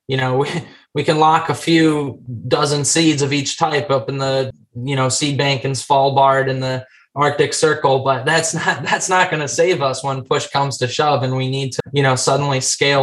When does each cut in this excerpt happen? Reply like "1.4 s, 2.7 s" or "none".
4.5 s, 11.7 s